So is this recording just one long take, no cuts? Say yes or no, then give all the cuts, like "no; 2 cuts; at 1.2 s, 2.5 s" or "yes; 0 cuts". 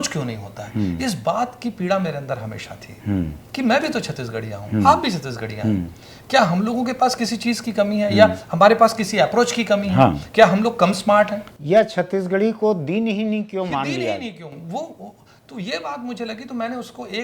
yes; 0 cuts